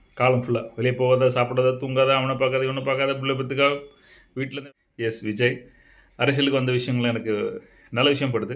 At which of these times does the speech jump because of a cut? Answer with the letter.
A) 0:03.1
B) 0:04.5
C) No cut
B